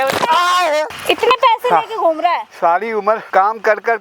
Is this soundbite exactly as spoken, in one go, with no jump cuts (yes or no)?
no